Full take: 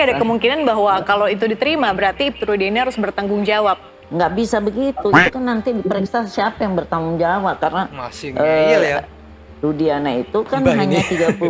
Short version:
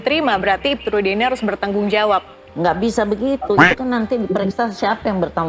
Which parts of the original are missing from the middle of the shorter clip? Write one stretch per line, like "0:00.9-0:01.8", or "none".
none